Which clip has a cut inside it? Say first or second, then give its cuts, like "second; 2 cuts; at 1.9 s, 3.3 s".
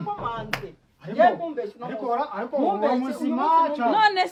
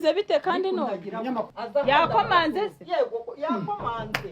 second; 1 cut; at 1.5 s